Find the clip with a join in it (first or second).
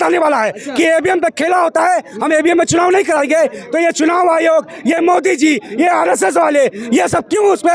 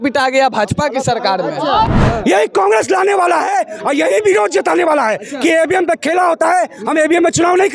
second